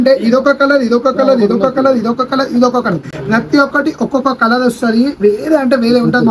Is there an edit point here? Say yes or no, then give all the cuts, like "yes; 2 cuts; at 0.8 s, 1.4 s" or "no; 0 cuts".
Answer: no; 0 cuts